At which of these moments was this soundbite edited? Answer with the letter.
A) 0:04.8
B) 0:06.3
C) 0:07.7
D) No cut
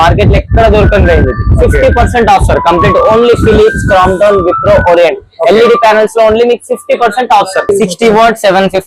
C